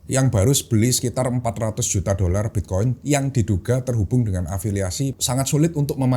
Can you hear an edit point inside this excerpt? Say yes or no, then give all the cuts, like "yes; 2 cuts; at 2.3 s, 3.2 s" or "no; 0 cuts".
yes; 1 cut; at 5.2 s